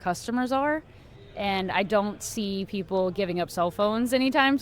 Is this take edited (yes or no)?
no